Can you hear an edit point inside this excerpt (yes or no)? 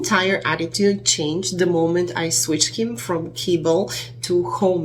no